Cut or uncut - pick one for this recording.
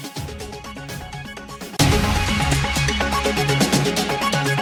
uncut